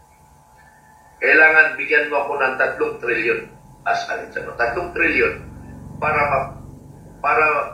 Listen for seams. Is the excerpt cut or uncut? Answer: uncut